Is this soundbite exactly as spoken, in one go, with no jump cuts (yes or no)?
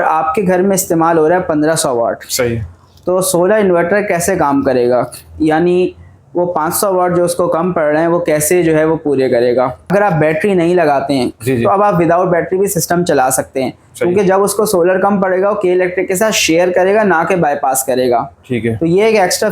no